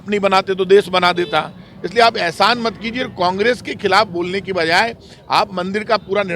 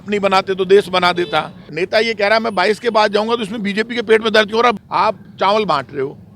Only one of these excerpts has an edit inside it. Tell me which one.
second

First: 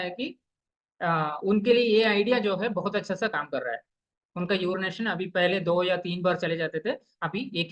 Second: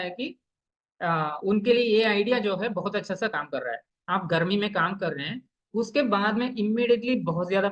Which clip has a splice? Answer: second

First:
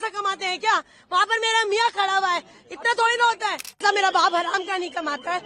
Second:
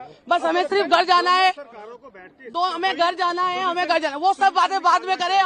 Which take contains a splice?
first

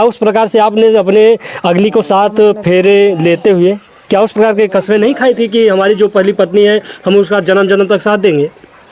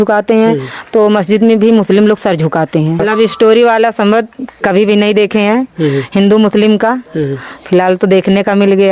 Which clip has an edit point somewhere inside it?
second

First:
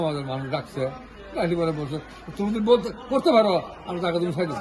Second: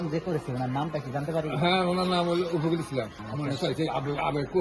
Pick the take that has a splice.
second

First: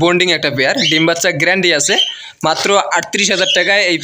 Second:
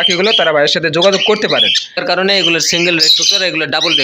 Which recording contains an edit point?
second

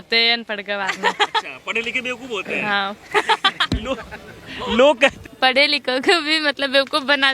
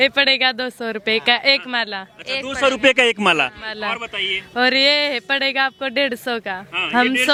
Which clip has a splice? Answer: first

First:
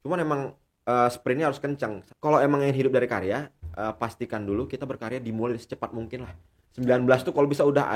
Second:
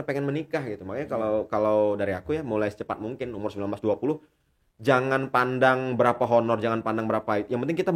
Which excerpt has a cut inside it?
first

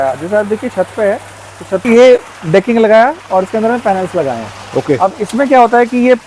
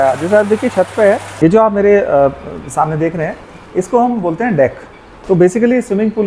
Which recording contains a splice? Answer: second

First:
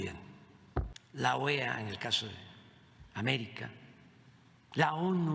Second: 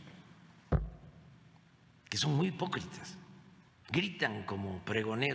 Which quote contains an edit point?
first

